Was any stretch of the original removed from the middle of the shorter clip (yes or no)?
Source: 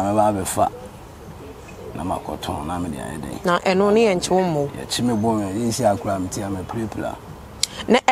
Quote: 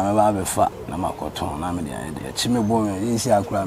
yes